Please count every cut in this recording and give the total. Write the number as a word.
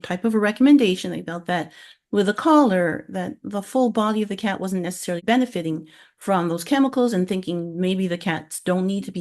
one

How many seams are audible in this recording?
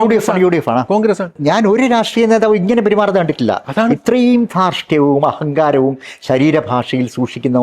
one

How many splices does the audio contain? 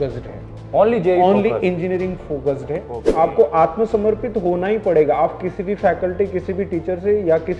one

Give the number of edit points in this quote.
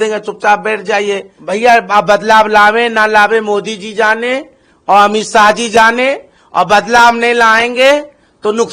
one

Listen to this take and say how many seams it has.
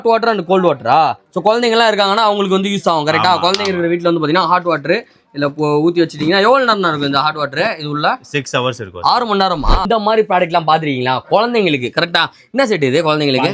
one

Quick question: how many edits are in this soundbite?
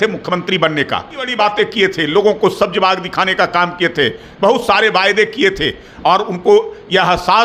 zero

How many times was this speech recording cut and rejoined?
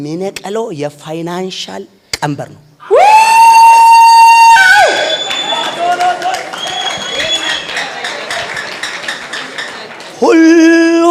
zero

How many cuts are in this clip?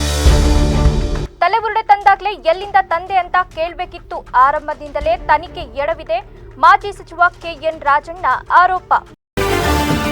one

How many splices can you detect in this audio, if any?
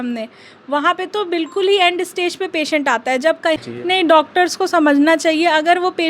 one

